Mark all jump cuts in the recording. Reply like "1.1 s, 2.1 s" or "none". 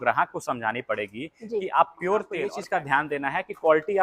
2.5 s